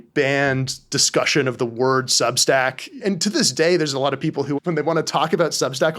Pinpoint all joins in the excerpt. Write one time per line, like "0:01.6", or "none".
0:03.0